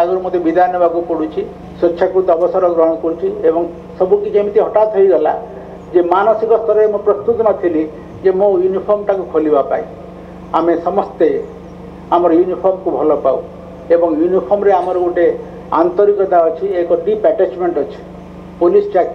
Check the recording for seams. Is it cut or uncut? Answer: uncut